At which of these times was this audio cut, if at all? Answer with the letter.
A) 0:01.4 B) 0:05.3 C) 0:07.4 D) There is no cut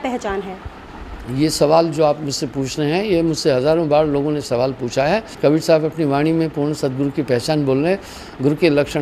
B